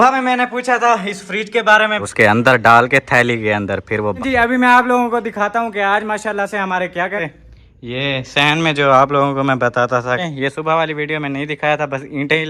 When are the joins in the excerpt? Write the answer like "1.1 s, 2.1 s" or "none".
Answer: 2.0 s, 4.2 s, 7.2 s, 10.2 s

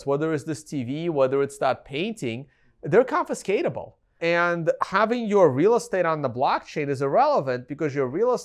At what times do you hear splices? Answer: 4.2 s

